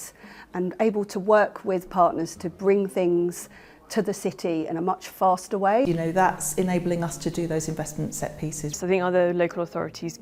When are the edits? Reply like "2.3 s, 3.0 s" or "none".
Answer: 5.9 s, 8.7 s

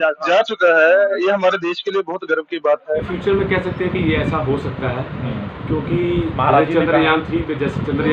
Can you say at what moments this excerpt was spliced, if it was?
3.0 s

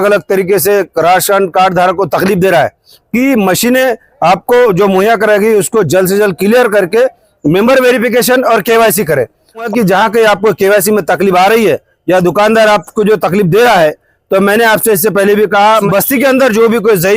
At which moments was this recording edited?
2.9 s, 9.7 s, 15.9 s

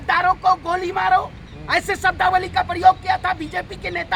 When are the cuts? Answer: none

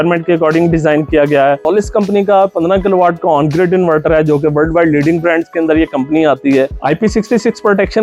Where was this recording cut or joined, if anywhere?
1.6 s, 6.7 s

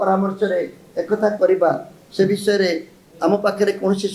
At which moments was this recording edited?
none

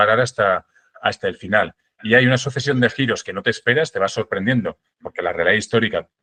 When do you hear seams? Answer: none

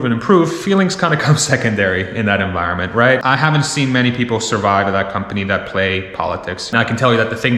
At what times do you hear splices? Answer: 3.2 s, 6.6 s

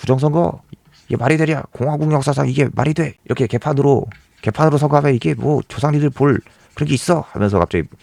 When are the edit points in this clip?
none

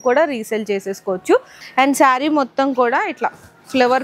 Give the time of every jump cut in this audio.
1.5 s

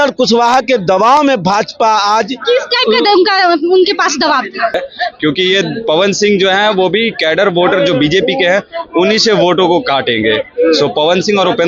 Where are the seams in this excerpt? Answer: 4.8 s

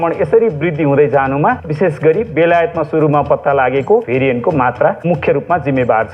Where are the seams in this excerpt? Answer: 1.7 s, 4.1 s

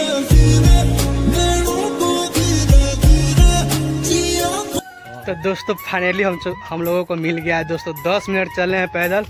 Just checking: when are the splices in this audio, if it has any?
4.8 s

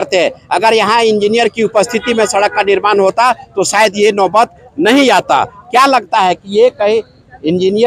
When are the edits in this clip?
none

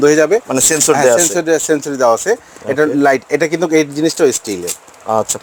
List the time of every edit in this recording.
none

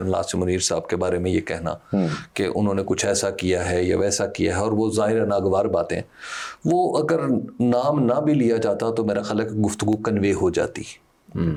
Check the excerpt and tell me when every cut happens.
none

